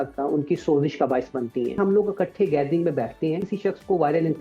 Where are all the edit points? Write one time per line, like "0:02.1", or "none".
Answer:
0:01.7
0:03.5